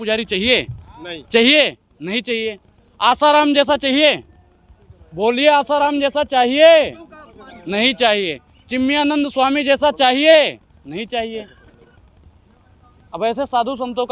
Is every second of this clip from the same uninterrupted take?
yes; 0 cuts

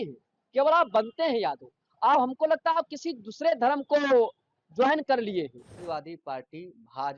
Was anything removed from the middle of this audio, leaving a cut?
yes; 1 cut; at 5.8 s

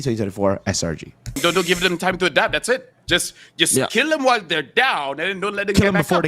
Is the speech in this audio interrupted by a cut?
yes; 1 cut; at 1.4 s

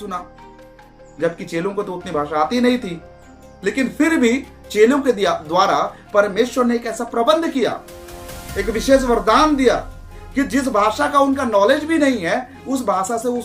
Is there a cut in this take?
no; 0 cuts

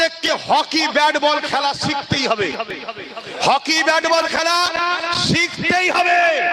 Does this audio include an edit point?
no; 0 cuts

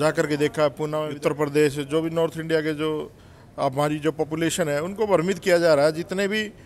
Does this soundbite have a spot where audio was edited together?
yes; 1 cut; at 1.0 s

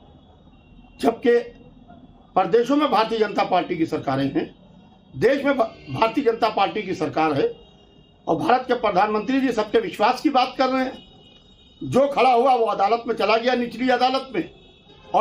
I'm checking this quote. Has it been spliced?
no; 0 cuts

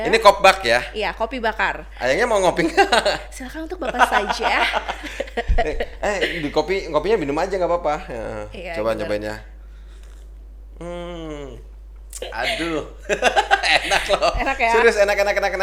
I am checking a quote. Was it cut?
no; 0 cuts

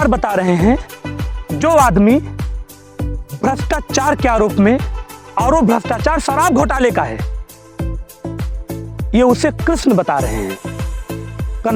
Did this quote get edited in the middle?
yes; 2 cuts; at 7.5 s, 8.9 s

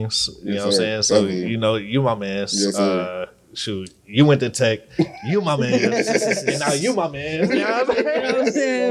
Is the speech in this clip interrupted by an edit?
no; 0 cuts

